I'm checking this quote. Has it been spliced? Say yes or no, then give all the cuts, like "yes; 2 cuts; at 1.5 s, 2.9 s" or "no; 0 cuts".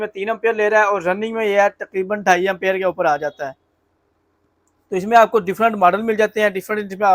no; 0 cuts